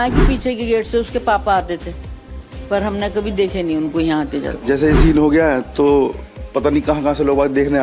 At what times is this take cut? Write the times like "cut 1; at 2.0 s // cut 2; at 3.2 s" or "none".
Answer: cut 1; at 4.6 s